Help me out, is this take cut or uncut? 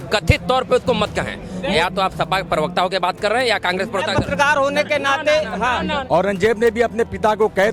cut